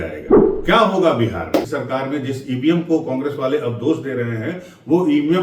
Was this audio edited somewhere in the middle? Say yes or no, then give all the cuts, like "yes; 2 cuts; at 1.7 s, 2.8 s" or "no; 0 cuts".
yes; 1 cut; at 1.7 s